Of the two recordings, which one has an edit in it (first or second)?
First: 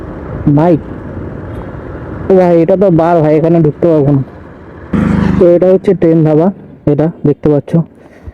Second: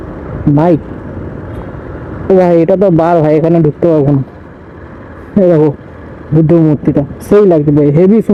first